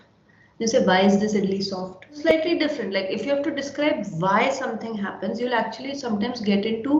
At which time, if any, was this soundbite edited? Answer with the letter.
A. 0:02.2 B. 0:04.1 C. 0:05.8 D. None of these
A